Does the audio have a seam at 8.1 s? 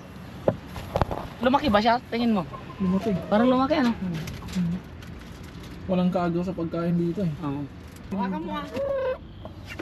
yes; 1 cut; at 8.1 s

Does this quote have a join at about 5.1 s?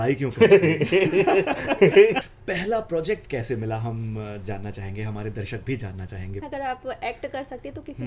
no; 2 cuts; at 2.2 s, 6.4 s

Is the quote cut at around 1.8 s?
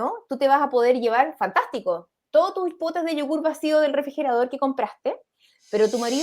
no; 1 cut; at 5.3 s

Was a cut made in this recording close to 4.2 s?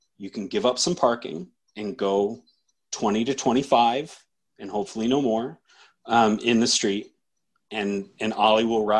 no; 0 cuts

